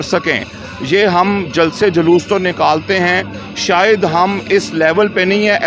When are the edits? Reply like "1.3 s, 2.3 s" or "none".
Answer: none